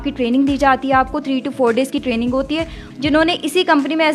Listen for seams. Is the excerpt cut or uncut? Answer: cut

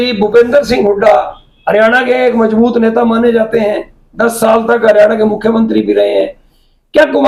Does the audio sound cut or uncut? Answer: uncut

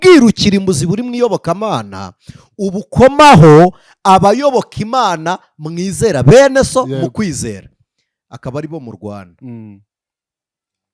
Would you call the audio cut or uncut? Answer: uncut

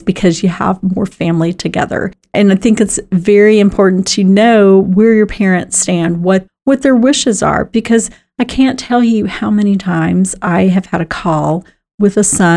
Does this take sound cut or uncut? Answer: cut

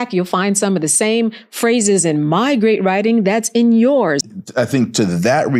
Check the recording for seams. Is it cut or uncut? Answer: cut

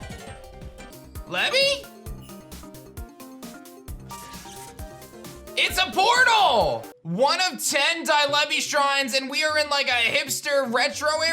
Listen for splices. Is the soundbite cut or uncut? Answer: cut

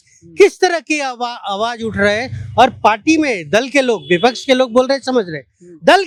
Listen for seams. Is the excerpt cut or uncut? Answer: uncut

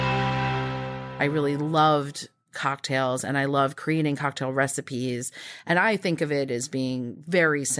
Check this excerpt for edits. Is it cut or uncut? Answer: cut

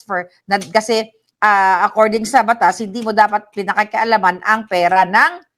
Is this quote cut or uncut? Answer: uncut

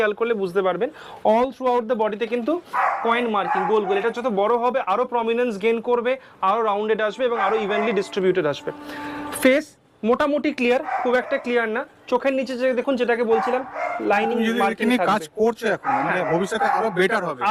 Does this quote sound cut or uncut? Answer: uncut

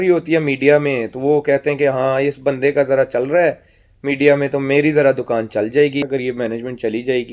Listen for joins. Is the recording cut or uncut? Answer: cut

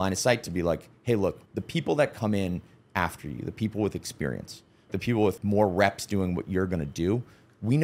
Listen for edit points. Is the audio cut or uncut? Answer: cut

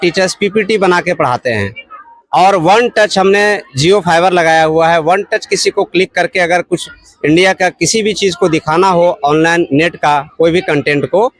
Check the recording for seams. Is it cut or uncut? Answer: uncut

